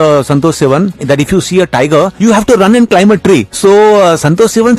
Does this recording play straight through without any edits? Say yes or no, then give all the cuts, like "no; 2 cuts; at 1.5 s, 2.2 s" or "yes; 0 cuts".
no; 3 cuts; at 1.0 s, 2.1 s, 3.5 s